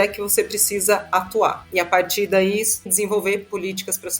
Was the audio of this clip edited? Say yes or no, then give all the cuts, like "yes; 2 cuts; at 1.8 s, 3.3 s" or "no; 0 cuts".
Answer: yes; 1 cut; at 2.9 s